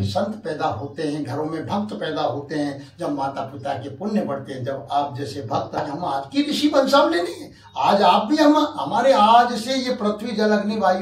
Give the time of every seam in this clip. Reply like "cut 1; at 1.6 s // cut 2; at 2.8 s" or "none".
cut 1; at 5.8 s